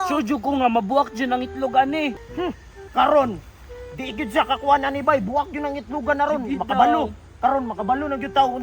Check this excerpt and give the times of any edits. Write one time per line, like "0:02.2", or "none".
0:02.2